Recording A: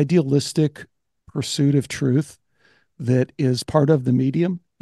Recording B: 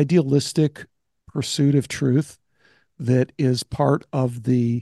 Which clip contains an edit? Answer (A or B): A